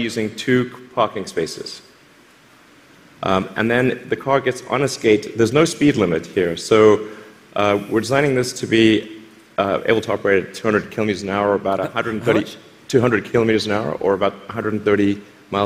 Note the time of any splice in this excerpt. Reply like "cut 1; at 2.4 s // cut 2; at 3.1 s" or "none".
none